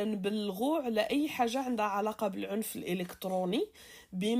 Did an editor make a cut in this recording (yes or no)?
no